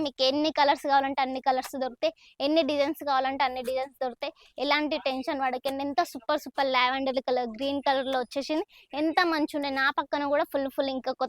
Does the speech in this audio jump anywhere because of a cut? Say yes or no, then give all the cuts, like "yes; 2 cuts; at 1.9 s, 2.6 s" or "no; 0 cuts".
no; 0 cuts